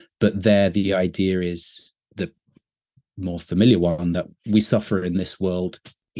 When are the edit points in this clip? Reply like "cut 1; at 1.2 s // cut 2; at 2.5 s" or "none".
none